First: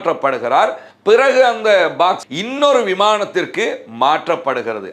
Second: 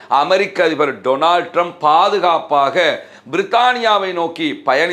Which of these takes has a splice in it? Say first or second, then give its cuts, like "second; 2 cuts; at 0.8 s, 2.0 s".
first; 1 cut; at 2.3 s